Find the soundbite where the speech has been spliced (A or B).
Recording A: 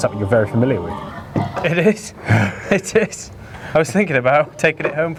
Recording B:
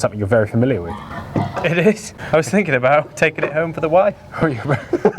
B